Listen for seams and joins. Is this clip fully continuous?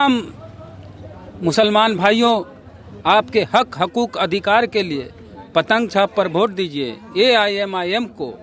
yes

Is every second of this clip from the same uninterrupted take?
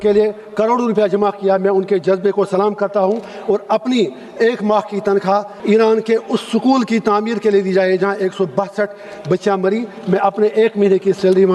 no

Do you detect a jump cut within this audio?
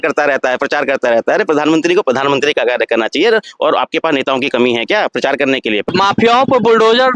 yes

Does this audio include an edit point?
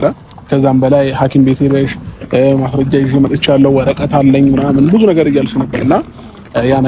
no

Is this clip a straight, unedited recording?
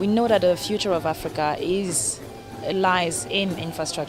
yes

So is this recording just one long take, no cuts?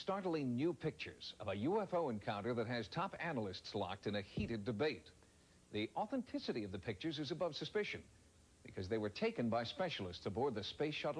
no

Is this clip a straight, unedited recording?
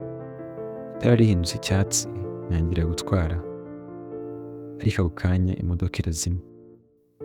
no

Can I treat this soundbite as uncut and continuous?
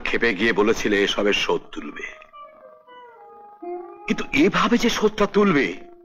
yes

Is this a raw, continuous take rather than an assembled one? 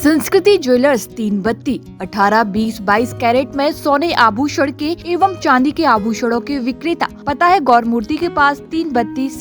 no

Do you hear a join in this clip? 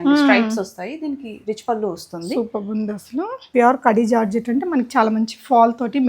yes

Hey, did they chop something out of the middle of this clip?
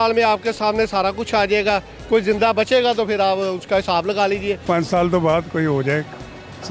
yes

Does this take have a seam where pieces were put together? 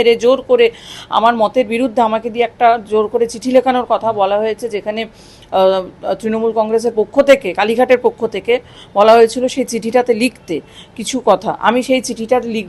no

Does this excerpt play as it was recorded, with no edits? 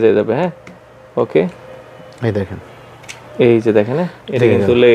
yes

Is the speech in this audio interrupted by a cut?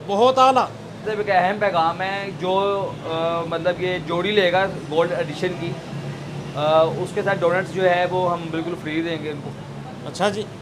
yes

